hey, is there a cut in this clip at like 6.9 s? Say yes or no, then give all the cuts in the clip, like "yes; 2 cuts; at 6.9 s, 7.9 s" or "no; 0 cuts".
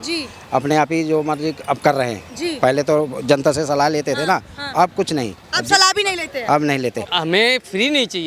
yes; 1 cut; at 6.9 s